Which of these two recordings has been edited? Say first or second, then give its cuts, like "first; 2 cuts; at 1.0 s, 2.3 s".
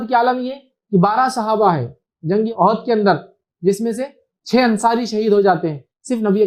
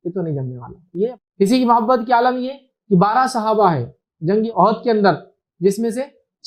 second; 1 cut; at 1.1 s